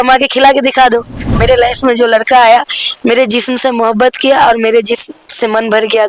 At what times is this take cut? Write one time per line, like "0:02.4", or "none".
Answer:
0:01.3